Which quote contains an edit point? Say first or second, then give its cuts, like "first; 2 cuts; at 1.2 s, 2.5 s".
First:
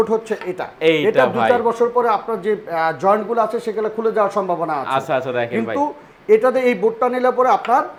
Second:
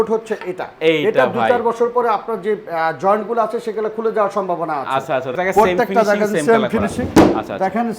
second; 1 cut; at 5.3 s